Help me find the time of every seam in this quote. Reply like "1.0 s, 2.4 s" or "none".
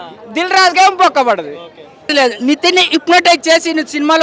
2.1 s